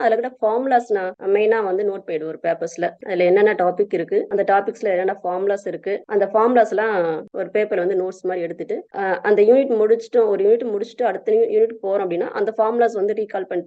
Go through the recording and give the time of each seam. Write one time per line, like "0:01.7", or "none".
none